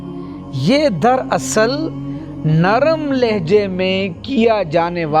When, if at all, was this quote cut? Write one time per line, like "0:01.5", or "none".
none